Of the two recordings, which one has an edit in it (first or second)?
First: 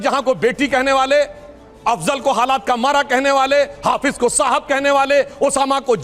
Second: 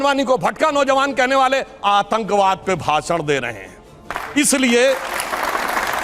second